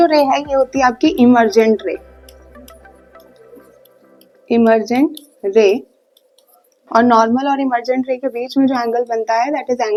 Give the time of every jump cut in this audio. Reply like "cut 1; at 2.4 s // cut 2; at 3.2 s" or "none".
none